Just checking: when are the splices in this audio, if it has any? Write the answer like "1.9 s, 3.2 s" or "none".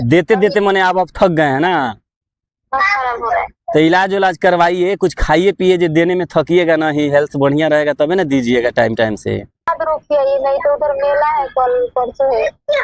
9.5 s